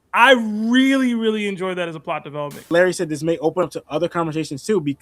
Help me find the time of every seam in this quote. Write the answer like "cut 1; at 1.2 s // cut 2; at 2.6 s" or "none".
cut 1; at 2.7 s